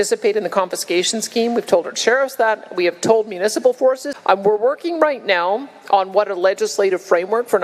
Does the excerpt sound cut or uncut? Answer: cut